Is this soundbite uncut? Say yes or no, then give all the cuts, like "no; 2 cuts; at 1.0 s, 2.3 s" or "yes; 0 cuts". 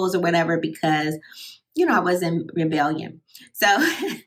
yes; 0 cuts